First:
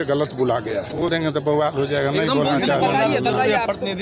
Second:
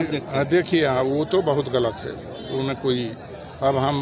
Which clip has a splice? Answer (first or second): first